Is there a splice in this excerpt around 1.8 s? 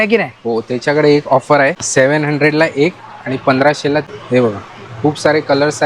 yes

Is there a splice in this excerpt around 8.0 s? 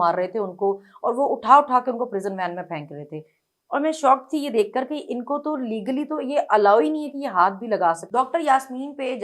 yes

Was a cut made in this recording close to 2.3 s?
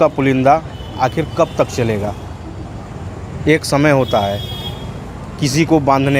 no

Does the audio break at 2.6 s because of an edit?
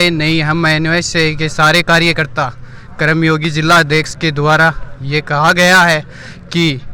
no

